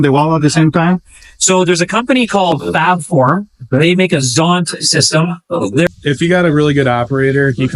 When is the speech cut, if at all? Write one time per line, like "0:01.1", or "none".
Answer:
0:05.9